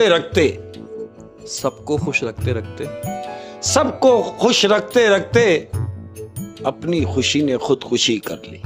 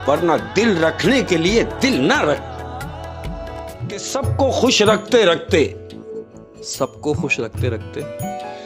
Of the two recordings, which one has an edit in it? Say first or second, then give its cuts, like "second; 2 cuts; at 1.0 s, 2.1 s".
second; 1 cut; at 3.8 s